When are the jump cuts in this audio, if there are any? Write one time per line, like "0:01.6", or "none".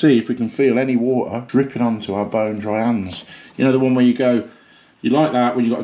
0:01.4